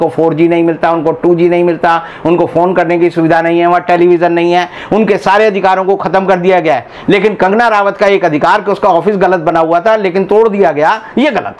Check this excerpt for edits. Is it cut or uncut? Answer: uncut